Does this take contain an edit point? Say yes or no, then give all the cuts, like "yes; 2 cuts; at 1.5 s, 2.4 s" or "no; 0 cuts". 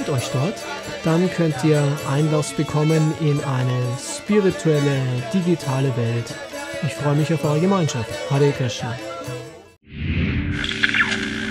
yes; 1 cut; at 9.8 s